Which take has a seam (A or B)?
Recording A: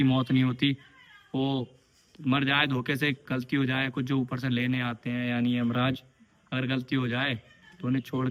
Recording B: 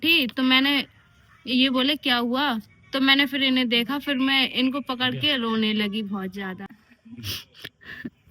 B